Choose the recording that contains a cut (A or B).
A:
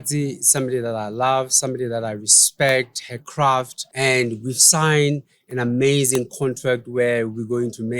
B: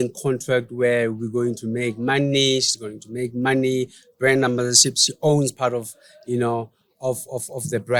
A